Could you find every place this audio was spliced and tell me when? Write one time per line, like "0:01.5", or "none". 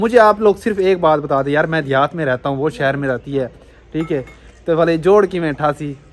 none